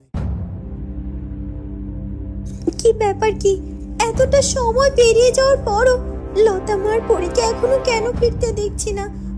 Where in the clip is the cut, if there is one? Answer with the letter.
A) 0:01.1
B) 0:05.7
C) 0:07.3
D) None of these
D